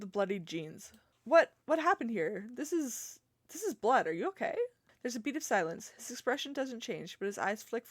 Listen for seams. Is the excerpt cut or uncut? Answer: cut